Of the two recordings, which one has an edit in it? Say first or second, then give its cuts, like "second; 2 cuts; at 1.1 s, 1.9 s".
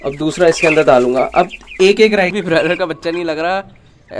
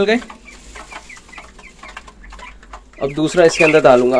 first; 1 cut; at 2.3 s